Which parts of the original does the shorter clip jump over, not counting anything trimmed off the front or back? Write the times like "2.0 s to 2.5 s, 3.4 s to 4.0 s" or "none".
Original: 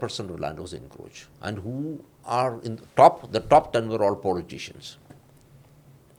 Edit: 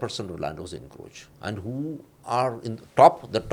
none